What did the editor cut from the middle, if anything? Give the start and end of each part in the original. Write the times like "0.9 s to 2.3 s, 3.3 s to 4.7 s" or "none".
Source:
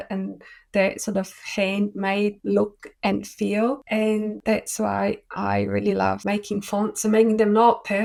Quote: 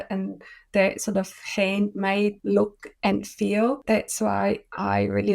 3.8 s to 4.4 s